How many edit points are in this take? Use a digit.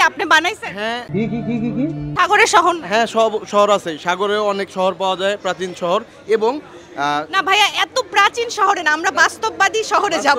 1